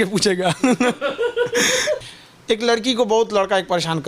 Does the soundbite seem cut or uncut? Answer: cut